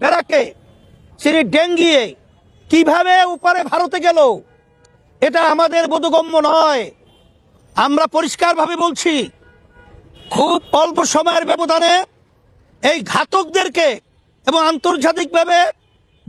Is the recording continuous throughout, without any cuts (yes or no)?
yes